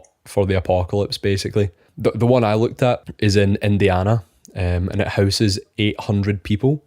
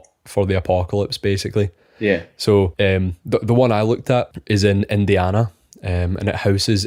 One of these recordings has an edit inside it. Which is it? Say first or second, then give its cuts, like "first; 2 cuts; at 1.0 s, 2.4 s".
first; 1 cut; at 1.9 s